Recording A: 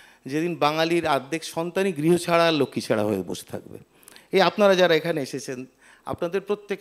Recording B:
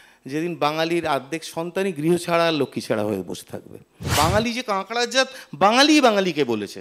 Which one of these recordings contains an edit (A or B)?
B